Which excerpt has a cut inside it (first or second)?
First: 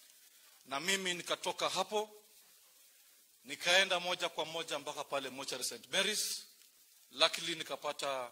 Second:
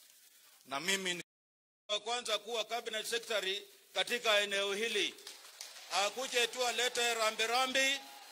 second